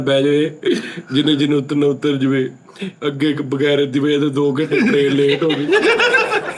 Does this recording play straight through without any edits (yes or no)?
yes